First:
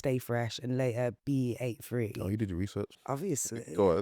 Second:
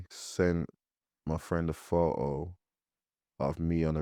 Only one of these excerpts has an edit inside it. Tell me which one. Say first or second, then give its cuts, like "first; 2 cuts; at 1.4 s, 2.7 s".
first; 1 cut; at 3.0 s